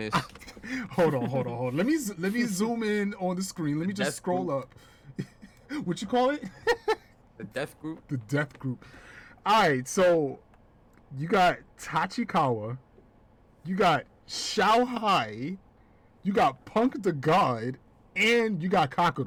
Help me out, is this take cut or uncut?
uncut